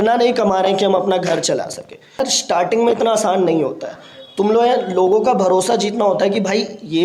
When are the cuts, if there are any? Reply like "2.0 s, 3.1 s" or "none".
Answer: 2.4 s